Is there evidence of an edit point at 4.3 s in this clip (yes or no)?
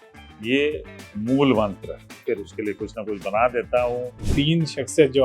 yes